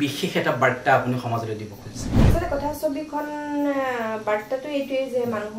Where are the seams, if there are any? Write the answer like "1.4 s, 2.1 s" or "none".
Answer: 2.1 s